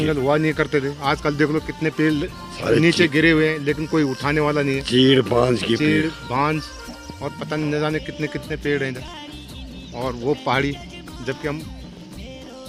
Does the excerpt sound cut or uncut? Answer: uncut